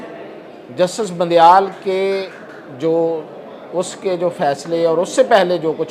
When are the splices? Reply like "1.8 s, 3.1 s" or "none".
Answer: none